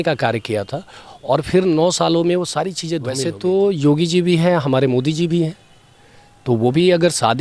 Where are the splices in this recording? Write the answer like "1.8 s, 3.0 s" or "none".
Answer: 3.1 s